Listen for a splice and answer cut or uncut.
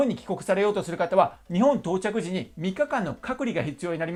uncut